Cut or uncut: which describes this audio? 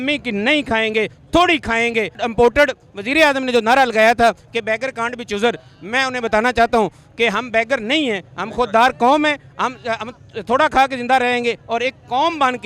cut